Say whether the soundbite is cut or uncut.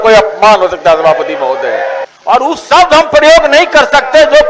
cut